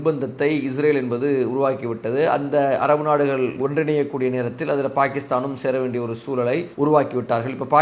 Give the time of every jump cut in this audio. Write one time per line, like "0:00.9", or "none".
0:06.7